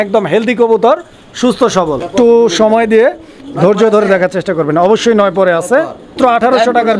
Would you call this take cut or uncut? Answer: cut